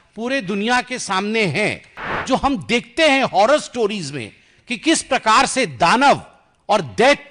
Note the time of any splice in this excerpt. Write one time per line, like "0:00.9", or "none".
0:02.1